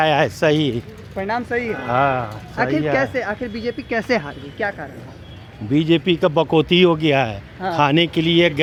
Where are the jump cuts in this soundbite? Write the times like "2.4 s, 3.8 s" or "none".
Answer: none

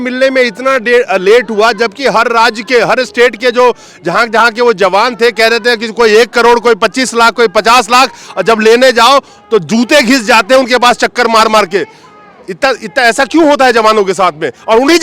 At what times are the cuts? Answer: none

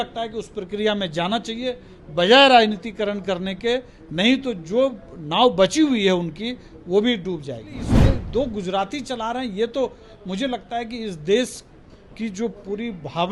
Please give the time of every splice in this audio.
7.9 s

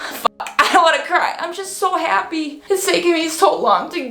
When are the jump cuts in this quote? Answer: 2.6 s

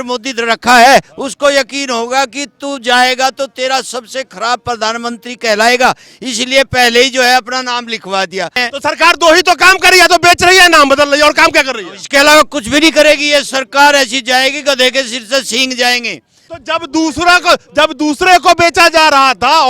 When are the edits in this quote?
8.6 s, 16.4 s

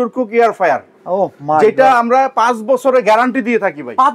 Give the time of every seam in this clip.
none

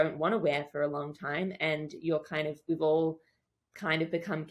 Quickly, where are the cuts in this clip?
none

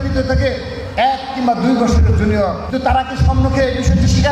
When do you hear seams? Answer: 2.6 s

